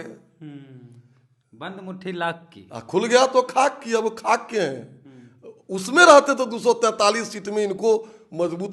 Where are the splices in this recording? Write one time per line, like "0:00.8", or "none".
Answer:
none